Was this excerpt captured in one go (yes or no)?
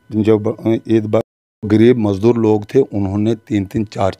no